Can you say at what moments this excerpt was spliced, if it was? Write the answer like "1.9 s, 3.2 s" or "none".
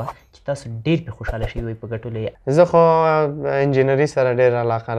2.3 s